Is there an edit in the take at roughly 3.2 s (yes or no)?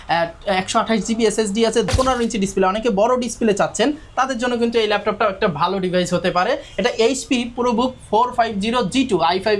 no